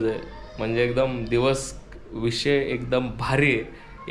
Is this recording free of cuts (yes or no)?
yes